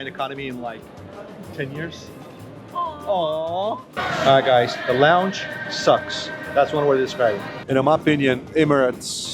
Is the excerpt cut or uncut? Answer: cut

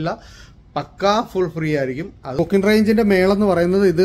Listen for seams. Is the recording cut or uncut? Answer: cut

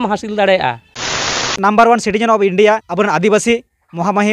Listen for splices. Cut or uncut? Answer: cut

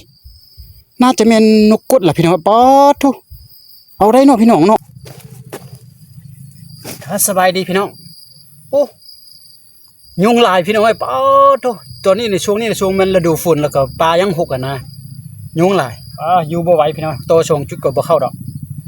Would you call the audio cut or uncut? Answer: cut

